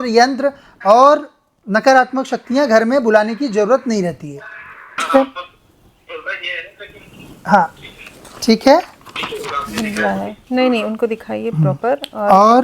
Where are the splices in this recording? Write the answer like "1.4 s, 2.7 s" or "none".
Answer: 5.0 s

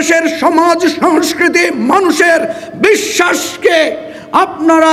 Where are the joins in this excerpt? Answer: none

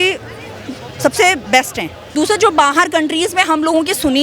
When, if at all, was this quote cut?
2.0 s

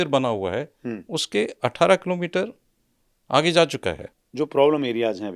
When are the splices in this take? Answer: 4.1 s

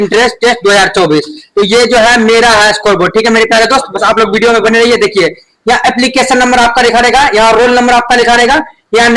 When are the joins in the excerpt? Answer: none

